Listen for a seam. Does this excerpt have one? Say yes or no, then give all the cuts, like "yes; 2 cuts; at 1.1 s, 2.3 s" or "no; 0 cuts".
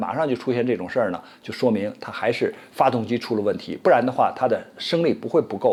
no; 0 cuts